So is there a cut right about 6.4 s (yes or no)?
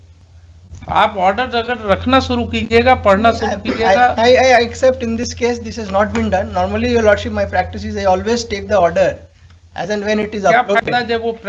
no